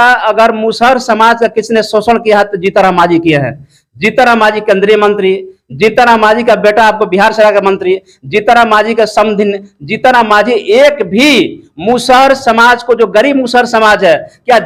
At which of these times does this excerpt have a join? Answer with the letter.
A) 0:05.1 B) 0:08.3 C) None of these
C